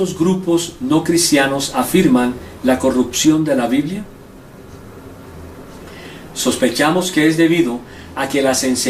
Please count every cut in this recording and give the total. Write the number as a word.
one